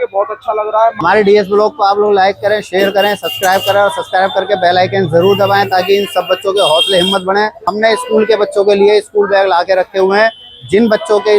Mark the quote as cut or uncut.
cut